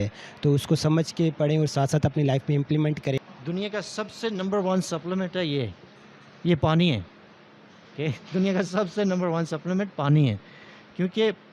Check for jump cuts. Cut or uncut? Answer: cut